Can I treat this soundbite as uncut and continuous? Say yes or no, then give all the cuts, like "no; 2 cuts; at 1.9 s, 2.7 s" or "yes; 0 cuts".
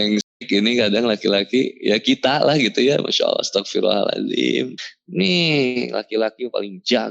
no; 1 cut; at 4.8 s